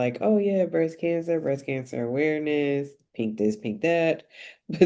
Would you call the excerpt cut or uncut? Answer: uncut